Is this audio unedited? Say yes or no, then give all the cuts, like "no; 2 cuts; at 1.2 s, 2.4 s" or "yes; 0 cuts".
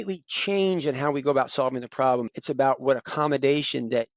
no; 1 cut; at 2.3 s